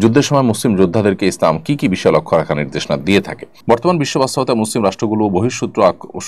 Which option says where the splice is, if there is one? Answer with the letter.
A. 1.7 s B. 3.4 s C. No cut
B